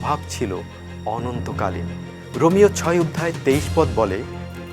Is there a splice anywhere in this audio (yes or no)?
yes